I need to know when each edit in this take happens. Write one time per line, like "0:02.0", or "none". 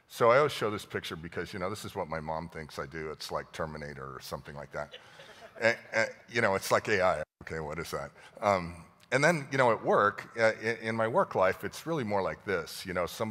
0:08.0